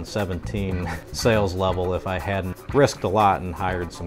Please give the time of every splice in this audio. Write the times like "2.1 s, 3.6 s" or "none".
0.9 s, 2.6 s